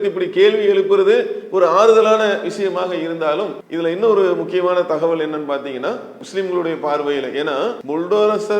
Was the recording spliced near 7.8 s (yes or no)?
yes